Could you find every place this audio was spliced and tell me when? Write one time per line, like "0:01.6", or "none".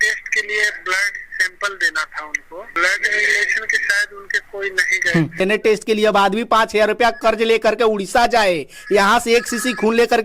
0:02.7
0:05.4